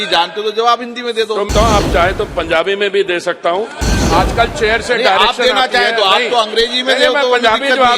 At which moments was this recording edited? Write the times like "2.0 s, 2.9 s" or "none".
1.5 s, 3.8 s